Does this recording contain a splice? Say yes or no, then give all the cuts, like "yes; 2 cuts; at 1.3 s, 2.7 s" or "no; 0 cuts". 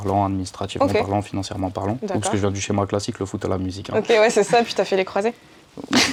no; 0 cuts